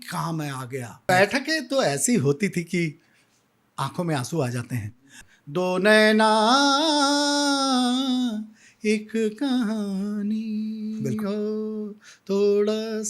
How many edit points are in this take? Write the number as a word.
two